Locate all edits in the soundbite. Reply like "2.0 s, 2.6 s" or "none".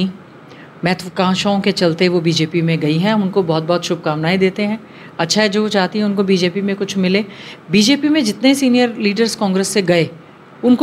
none